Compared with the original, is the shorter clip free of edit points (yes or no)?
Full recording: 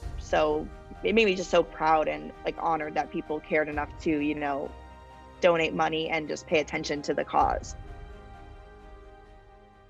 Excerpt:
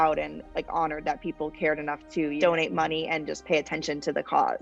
no